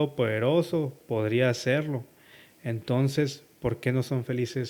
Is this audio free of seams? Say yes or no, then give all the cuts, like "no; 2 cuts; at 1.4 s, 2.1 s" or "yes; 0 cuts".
yes; 0 cuts